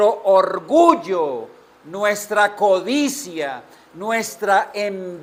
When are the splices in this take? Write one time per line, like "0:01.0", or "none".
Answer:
none

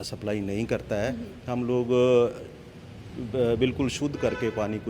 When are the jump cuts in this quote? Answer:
none

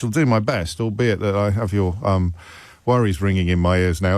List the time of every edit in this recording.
none

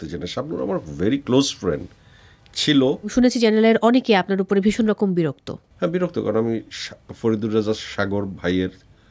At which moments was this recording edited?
0:03.1

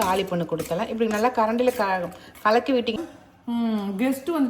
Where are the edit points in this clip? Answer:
0:03.0

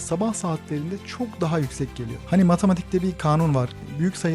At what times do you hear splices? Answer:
0:02.1

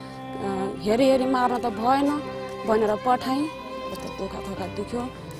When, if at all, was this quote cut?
0:03.9

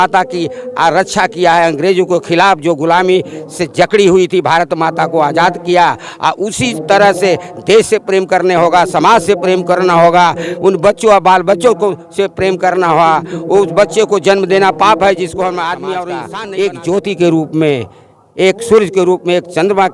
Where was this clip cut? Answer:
0:16.3

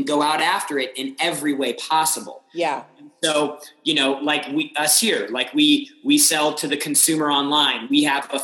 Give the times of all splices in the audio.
0:02.4

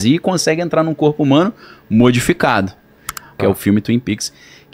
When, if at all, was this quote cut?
0:03.3

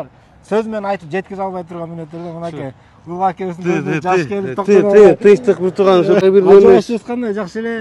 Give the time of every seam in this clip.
0:06.2

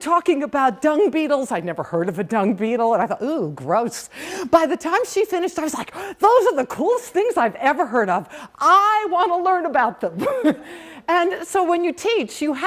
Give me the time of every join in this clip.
none

